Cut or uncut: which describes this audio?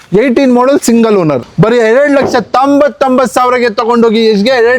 cut